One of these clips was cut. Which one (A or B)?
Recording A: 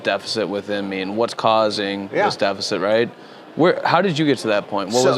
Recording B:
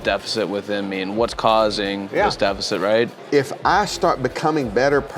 B